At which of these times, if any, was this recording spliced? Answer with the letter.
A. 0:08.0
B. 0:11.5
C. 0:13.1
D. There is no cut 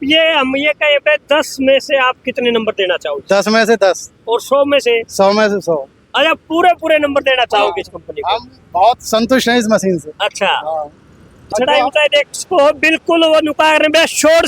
B